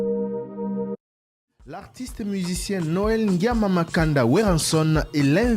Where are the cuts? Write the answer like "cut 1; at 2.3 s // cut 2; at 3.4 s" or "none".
cut 1; at 1.0 s